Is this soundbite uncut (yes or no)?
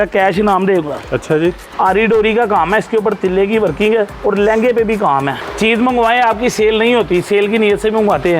no